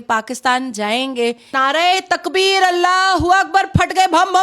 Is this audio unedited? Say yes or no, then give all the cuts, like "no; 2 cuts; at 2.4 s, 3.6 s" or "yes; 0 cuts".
no; 1 cut; at 1.5 s